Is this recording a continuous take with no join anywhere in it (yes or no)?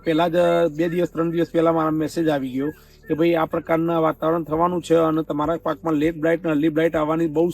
no